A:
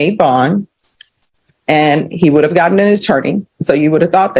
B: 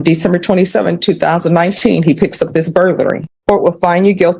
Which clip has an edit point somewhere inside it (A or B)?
B